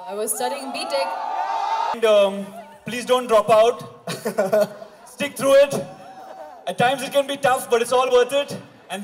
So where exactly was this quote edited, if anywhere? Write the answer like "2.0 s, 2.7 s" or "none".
1.9 s